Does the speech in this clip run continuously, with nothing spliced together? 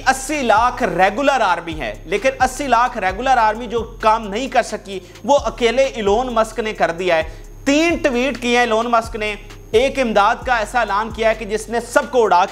yes; 0 cuts

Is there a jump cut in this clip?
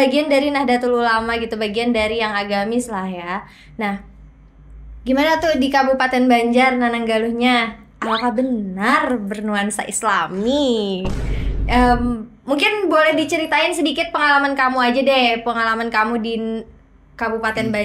no; 0 cuts

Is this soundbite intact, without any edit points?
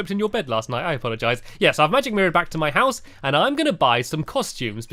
yes; 0 cuts

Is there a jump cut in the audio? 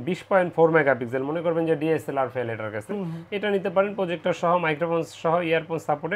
no; 0 cuts

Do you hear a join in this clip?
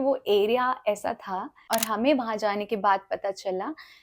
yes; 1 cut; at 1.6 s

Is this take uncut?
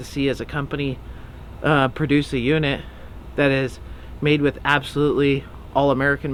yes; 0 cuts

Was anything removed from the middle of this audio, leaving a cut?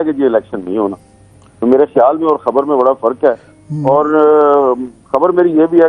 no; 0 cuts

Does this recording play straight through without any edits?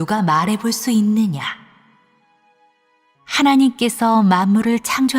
no; 1 cut; at 1.1 s

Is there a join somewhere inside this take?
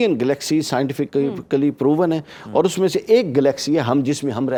no; 0 cuts

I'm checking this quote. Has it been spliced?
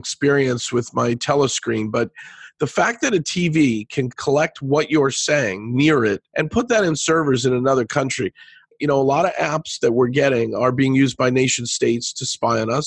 yes; 3 cuts; at 4.1 s, 6.2 s, 8.7 s

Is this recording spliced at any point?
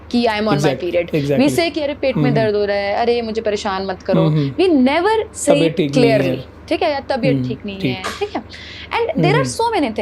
no; 0 cuts

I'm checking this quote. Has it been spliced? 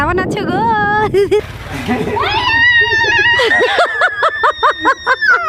yes; 1 cut; at 1.4 s

